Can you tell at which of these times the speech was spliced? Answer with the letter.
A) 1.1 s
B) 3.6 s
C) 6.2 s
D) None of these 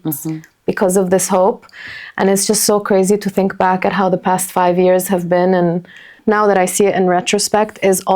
C